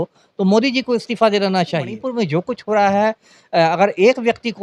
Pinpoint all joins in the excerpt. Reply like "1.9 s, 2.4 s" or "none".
2.0 s